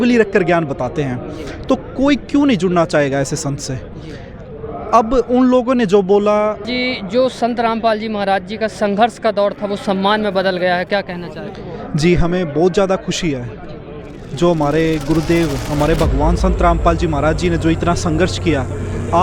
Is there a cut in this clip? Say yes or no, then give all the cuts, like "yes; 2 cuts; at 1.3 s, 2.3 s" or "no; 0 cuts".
yes; 1 cut; at 6.7 s